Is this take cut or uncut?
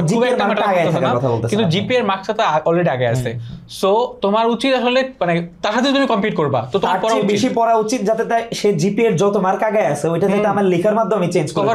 uncut